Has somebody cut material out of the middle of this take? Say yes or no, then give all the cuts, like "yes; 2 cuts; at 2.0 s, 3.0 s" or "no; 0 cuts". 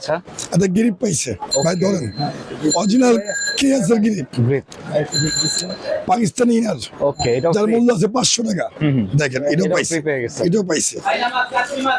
no; 0 cuts